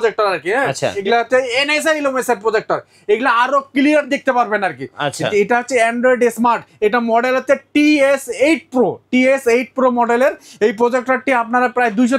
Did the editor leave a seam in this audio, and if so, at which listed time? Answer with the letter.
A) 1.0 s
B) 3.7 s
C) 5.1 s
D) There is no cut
A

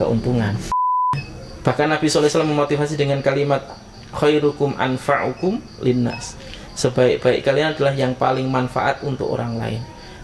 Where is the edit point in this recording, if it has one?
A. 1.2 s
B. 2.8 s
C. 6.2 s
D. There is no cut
A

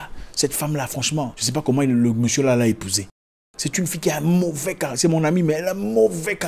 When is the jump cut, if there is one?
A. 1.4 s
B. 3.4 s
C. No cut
A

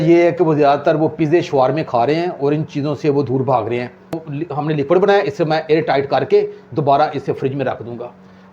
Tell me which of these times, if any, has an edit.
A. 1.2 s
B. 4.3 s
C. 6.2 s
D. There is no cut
B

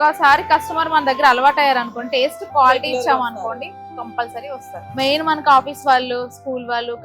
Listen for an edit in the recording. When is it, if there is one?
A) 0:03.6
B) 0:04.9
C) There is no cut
B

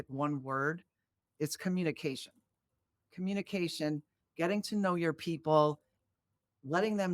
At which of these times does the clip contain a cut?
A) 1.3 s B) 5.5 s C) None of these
A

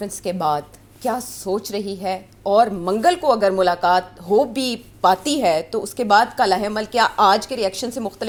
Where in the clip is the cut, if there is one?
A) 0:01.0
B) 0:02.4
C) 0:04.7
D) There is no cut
D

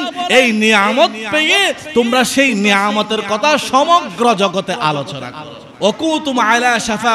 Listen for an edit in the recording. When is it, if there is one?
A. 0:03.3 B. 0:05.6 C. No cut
B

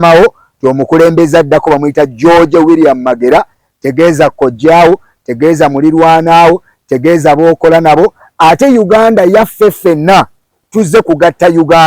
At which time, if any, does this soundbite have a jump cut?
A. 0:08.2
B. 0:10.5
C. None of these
B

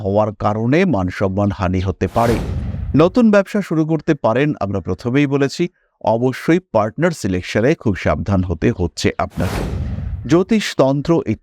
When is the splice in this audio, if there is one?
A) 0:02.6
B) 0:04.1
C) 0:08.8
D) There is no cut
A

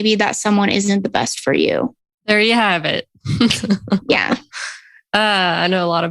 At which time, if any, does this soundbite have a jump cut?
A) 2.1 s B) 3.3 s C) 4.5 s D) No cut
A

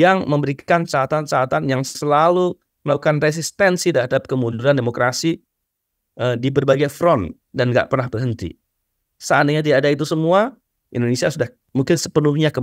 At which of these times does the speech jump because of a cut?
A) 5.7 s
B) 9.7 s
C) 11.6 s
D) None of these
C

